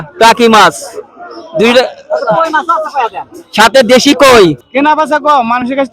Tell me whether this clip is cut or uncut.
cut